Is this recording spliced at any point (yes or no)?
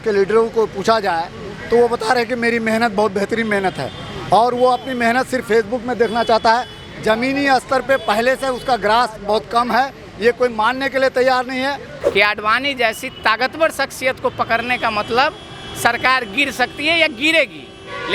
yes